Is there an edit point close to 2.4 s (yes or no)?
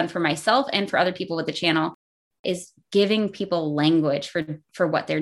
yes